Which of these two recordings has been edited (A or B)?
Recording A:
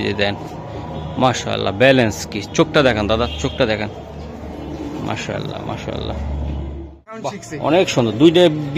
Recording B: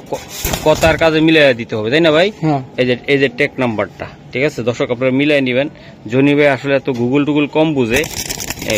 A